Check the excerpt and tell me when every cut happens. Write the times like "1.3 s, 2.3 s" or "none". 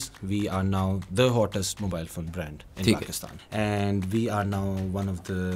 3.3 s